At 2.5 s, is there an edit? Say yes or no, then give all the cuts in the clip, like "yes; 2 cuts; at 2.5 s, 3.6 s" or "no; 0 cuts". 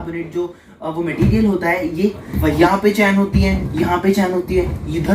yes; 1 cut; at 2.5 s